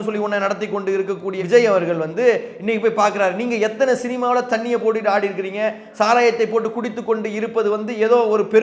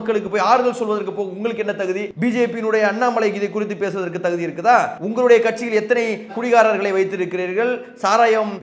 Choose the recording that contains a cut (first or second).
second